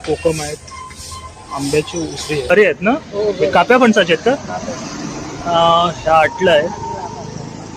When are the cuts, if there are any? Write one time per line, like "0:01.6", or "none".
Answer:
0:02.5